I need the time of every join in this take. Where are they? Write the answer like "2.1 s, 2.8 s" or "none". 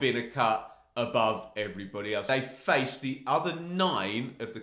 2.3 s